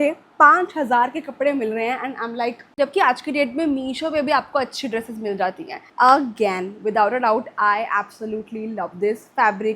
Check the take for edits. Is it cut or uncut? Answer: cut